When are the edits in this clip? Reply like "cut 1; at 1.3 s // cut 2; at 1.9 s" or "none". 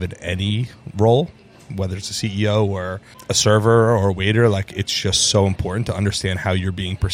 cut 1; at 3.1 s

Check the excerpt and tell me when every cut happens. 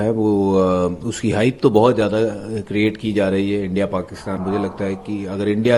cut 1; at 4.4 s

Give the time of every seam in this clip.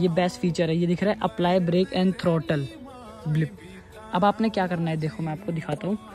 none

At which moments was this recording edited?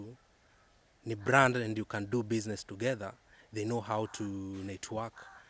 none

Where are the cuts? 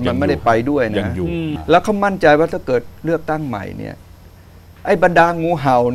cut 1; at 1.5 s

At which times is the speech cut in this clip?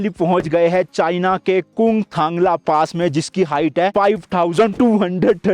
none

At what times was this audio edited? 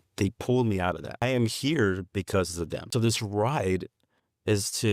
cut 1; at 1.2 s // cut 2; at 2.8 s

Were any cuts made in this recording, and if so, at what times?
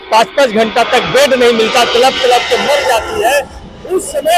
none

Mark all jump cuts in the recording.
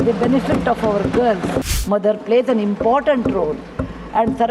cut 1; at 1.7 s

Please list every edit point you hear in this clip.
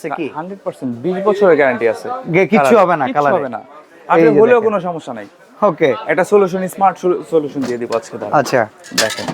none

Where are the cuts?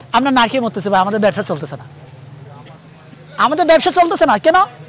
none

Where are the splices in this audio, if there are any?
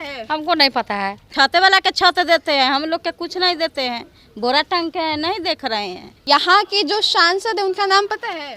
cut 1; at 1.3 s // cut 2; at 6.2 s

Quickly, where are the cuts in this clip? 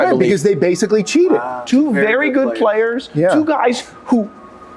cut 1; at 1.6 s

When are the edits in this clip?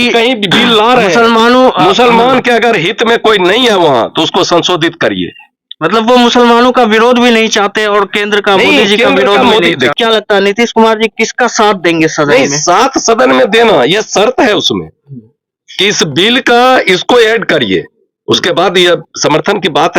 cut 1; at 9.9 s

